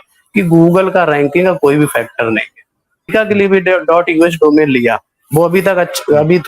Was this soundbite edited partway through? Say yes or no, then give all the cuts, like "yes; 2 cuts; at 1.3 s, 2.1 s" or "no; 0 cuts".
yes; 1 cut; at 3.1 s